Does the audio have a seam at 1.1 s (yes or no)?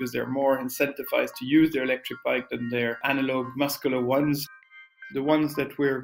no